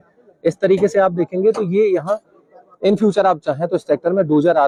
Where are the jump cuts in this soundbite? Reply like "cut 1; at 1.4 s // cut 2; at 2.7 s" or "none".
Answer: none